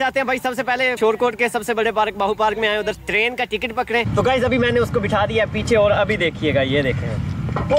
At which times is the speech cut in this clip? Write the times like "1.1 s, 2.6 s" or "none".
0.9 s, 3.0 s, 4.1 s

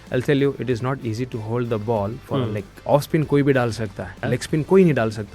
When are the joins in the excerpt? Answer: 2.7 s, 4.1 s

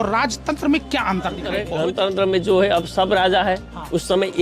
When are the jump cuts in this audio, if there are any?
1.6 s

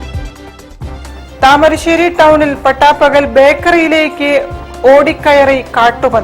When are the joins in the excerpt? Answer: 1.0 s

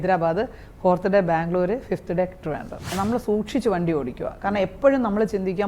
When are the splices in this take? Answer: 2.9 s

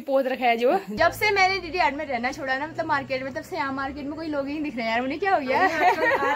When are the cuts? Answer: 0.9 s

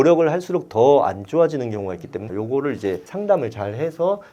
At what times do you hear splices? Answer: 2.3 s

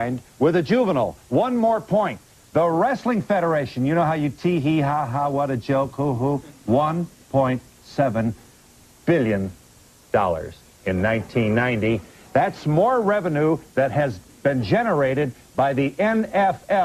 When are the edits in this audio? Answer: 12.3 s

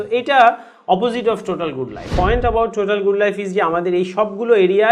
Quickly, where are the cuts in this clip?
2.0 s

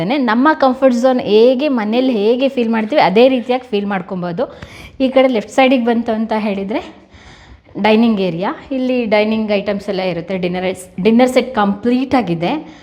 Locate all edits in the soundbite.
none

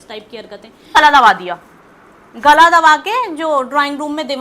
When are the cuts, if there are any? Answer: 0.9 s

